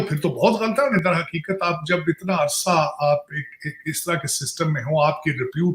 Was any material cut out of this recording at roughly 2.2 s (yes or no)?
no